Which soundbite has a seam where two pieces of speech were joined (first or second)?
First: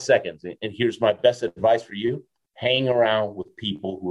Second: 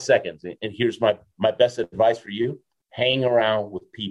first